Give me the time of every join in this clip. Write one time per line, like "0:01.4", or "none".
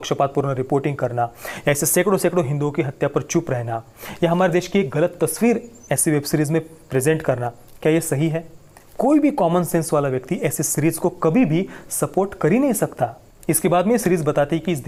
none